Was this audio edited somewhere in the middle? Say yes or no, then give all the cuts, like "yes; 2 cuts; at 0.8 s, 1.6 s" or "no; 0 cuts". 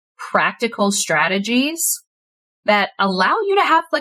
no; 0 cuts